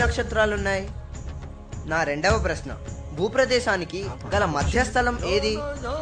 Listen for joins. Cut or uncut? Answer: uncut